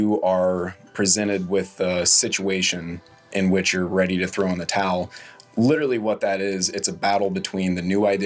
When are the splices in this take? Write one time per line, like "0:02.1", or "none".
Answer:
none